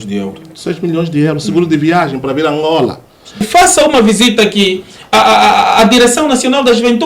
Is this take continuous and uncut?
no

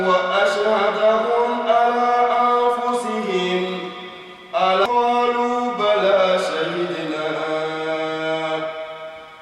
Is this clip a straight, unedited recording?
no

